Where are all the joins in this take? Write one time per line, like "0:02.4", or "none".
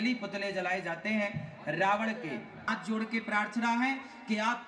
0:02.7